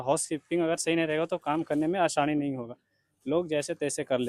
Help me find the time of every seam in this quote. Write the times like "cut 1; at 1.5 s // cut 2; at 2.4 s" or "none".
none